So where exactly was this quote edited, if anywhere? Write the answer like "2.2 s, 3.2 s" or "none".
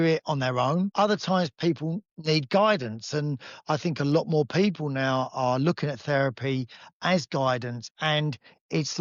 0.9 s